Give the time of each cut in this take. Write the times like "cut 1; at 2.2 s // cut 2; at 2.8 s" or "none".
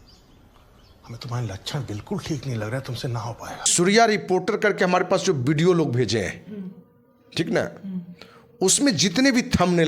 cut 1; at 3.7 s